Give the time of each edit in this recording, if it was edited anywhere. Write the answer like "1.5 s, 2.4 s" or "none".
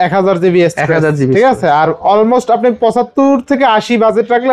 none